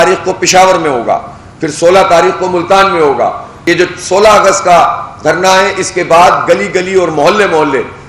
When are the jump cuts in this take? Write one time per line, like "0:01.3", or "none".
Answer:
0:03.5